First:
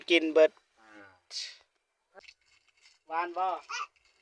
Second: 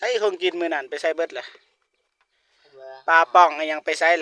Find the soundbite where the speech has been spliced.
first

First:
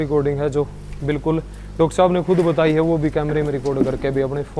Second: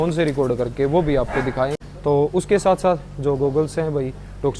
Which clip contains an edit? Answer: second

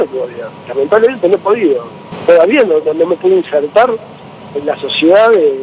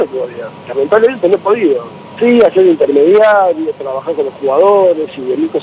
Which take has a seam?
first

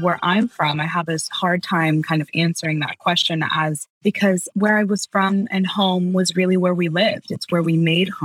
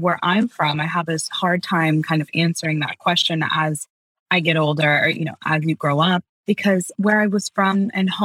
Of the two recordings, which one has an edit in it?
first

